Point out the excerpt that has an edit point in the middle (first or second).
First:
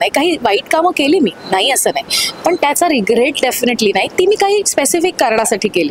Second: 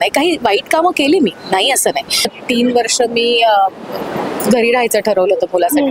second